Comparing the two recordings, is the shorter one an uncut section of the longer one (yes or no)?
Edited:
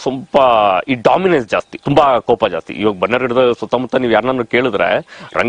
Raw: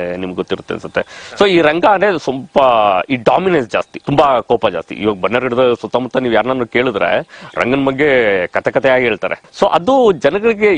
yes